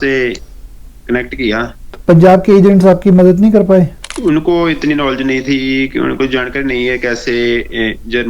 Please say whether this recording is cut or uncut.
cut